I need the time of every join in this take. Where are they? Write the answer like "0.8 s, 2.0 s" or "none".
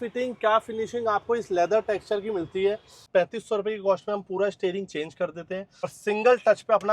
3.0 s, 6.0 s

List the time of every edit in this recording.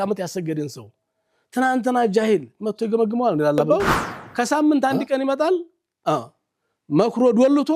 3.6 s

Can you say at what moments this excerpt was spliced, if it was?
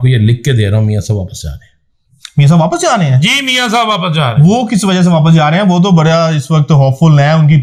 none

